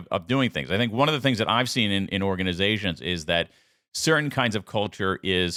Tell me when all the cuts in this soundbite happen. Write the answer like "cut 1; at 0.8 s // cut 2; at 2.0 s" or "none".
none